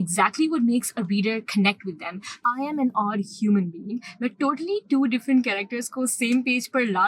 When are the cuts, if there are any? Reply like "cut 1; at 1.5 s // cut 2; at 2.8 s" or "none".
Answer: cut 1; at 2.2 s